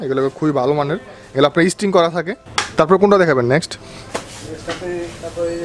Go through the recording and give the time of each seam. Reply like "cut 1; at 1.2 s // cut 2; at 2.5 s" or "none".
none